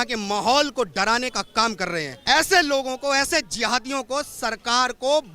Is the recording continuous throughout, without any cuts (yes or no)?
no